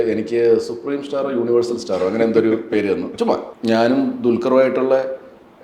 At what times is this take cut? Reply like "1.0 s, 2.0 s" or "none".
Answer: 3.5 s